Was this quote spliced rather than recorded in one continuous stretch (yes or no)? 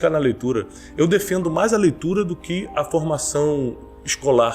no